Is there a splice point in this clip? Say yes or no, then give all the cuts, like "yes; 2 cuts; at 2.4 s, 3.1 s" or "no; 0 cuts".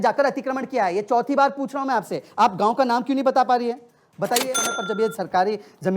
yes; 1 cut; at 4.6 s